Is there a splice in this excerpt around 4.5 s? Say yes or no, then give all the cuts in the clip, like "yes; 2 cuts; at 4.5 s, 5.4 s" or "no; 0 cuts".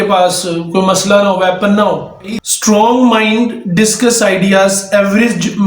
no; 1 cut; at 2.5 s